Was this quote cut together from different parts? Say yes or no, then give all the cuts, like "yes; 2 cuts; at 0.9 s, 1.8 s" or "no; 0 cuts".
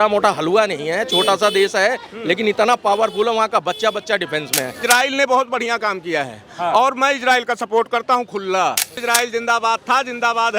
yes; 2 cuts; at 4.8 s, 9.0 s